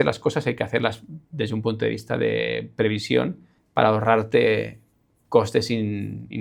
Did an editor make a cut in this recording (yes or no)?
no